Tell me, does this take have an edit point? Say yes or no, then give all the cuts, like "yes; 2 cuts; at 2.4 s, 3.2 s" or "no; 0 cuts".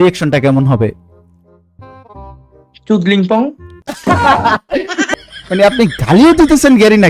yes; 1 cut; at 5.1 s